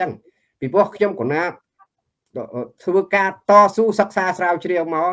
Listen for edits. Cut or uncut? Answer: uncut